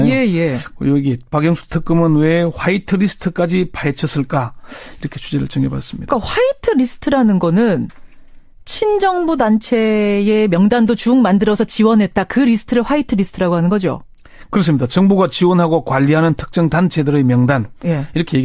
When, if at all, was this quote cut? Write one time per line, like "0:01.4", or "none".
0:07.8